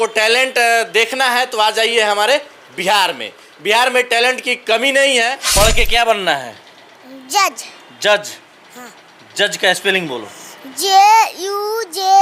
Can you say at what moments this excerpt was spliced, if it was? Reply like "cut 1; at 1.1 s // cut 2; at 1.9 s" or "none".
cut 1; at 5.4 s